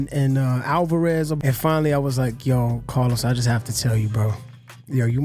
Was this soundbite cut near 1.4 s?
yes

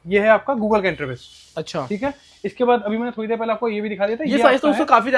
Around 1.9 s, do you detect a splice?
no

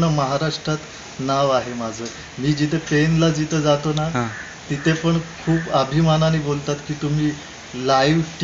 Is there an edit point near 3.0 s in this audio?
no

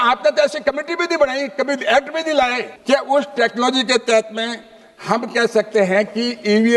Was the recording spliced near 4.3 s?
no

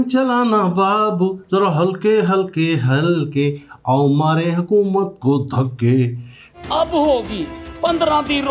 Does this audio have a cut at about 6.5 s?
yes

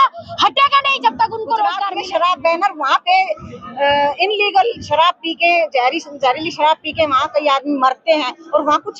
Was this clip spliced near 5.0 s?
no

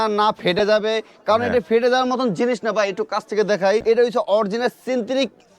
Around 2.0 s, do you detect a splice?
no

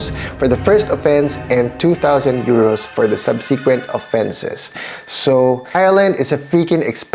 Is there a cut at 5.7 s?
yes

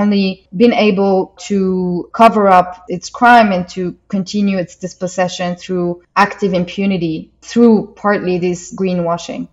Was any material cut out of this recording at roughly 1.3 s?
no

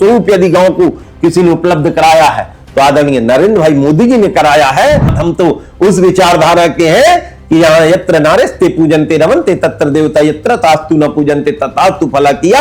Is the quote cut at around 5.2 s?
yes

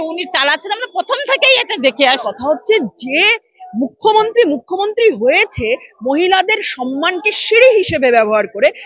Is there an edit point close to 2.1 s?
yes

